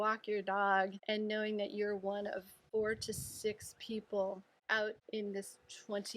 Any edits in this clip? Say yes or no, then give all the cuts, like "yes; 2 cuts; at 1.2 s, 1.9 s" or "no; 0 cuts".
yes; 3 cuts; at 1.0 s, 2.5 s, 4.9 s